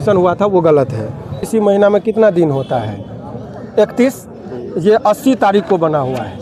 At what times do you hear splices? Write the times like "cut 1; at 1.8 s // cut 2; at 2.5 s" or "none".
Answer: cut 1; at 1.4 s